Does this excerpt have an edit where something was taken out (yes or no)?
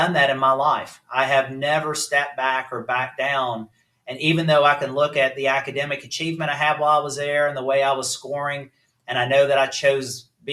no